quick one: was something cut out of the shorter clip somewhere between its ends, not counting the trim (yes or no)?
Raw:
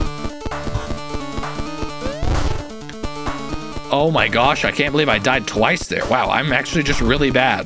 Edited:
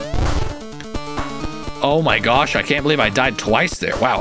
no